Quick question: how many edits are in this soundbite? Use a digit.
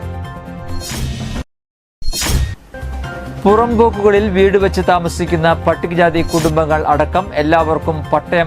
1